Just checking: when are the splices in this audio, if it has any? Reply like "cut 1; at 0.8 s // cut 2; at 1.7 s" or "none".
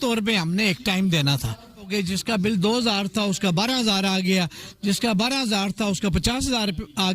cut 1; at 1.9 s